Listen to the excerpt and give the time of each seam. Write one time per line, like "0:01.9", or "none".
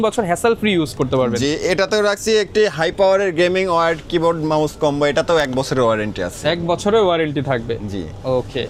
none